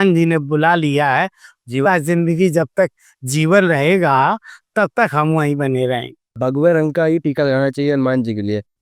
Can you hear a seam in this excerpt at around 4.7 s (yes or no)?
no